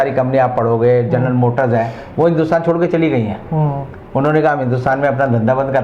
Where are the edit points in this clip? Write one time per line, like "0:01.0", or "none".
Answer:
none